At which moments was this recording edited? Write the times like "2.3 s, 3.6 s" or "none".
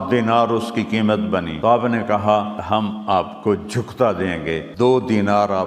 1.7 s, 2.8 s, 4.7 s